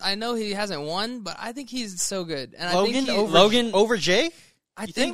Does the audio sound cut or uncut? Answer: uncut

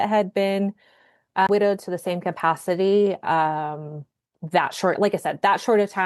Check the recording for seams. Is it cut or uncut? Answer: cut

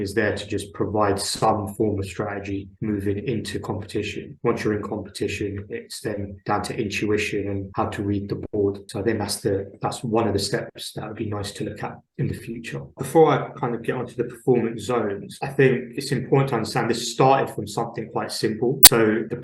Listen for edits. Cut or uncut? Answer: cut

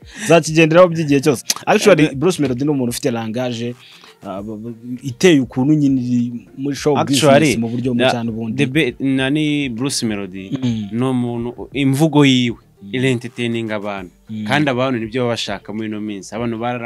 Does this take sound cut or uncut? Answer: uncut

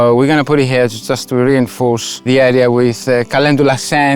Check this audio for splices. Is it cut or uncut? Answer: cut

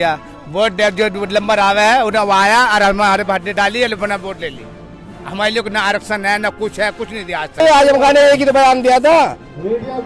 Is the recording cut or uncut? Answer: cut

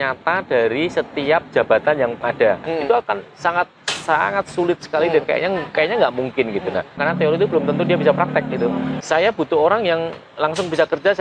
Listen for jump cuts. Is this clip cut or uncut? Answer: cut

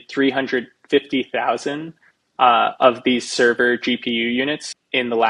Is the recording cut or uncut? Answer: uncut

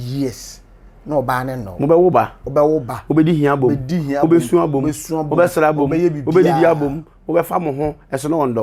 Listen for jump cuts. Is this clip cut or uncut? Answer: uncut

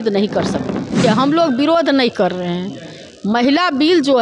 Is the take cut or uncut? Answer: cut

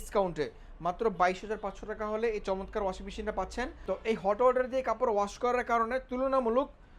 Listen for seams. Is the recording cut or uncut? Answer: cut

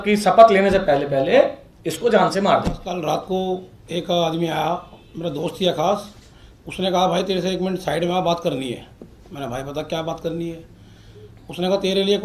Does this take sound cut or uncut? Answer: cut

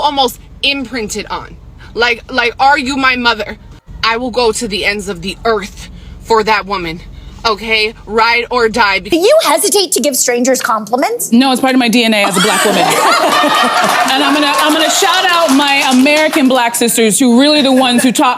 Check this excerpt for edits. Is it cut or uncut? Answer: cut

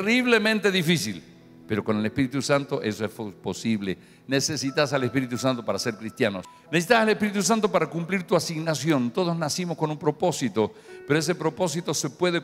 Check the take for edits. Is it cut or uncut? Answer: uncut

